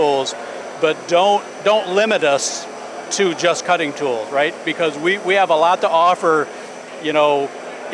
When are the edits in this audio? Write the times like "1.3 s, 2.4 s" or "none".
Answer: none